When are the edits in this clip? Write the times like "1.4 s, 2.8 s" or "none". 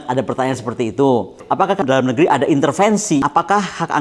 1.7 s, 3.2 s